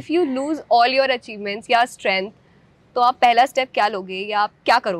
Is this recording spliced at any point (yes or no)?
no